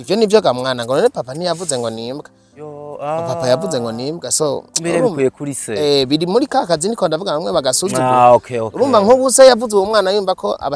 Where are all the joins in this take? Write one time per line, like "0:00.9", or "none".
none